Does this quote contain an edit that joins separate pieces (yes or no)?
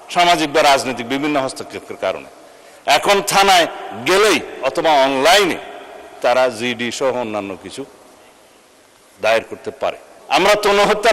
yes